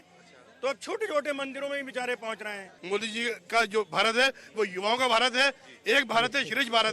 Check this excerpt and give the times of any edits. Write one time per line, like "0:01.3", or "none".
0:02.7